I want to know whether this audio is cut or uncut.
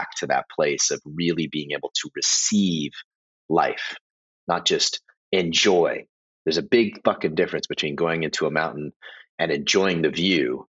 uncut